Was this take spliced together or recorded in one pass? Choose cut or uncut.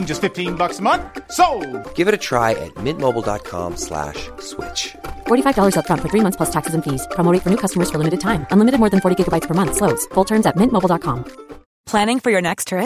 uncut